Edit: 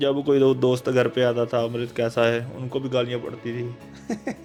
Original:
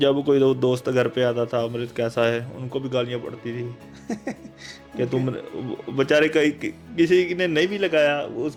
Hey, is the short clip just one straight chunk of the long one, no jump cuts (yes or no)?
yes